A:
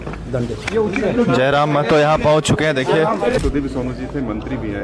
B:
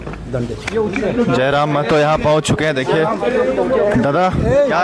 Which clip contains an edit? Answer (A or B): A